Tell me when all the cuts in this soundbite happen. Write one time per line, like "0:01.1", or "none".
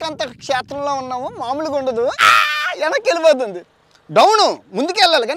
0:02.3